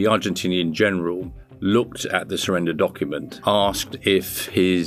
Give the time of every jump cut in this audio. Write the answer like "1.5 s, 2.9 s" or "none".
3.3 s